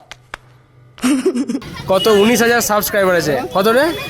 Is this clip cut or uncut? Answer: cut